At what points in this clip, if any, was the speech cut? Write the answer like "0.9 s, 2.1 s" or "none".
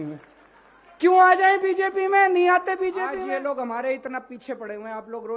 3.2 s